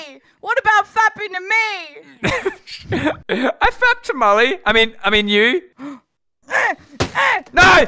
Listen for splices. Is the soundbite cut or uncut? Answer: cut